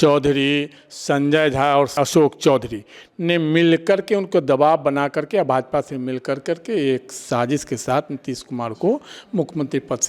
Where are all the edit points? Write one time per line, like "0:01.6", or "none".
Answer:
0:02.0